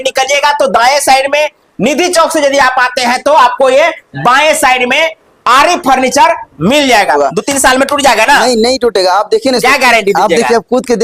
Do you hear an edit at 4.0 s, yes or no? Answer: no